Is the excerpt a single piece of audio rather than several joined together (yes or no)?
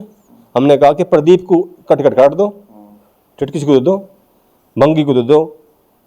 yes